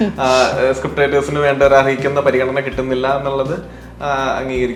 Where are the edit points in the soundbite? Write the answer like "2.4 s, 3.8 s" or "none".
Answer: none